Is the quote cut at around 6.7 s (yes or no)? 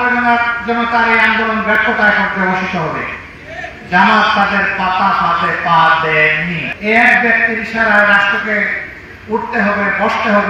yes